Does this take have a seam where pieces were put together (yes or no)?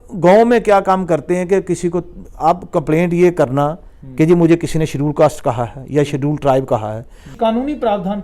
yes